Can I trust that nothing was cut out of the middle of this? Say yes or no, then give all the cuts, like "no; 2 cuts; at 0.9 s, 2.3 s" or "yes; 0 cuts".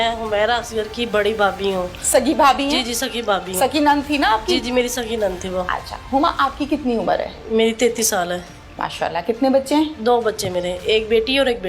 yes; 0 cuts